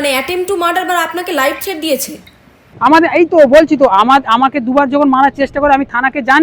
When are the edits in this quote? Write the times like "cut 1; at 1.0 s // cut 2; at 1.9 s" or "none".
none